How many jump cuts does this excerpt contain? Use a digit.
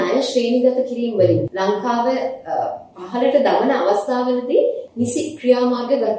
2